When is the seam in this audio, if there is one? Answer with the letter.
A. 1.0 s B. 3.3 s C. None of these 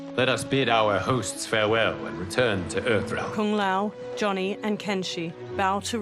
B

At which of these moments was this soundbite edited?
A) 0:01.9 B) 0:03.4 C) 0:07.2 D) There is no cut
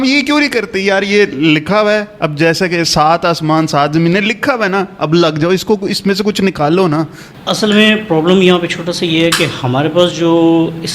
C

